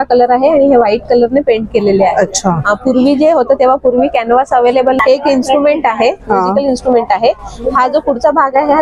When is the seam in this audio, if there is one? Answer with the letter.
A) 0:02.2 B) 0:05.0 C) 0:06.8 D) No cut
B